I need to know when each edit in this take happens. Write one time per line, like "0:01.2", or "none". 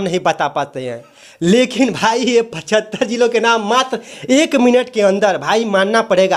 none